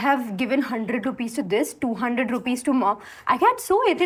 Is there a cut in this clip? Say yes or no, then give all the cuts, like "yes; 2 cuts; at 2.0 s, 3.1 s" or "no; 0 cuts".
no; 0 cuts